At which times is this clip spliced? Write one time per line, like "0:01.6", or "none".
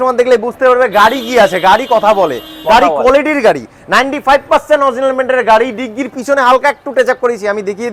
none